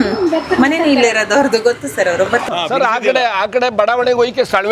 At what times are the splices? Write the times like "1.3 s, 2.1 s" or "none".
2.5 s